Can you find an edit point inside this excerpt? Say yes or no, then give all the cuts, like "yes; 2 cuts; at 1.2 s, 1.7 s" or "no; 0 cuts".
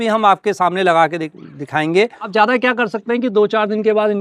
yes; 1 cut; at 2.2 s